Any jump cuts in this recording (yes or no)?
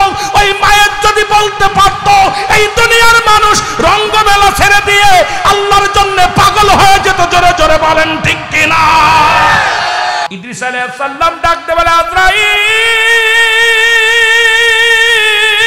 yes